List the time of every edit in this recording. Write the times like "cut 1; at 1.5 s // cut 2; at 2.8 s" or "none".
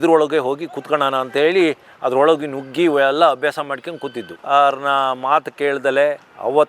cut 1; at 4.3 s